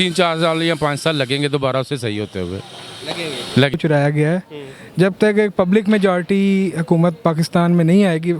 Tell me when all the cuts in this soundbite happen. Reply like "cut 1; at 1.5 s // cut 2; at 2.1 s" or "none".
cut 1; at 3.7 s